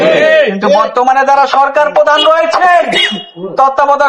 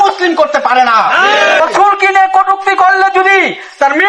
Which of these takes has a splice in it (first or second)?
second